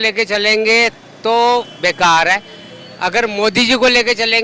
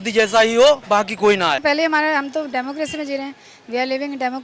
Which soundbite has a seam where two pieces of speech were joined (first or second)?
second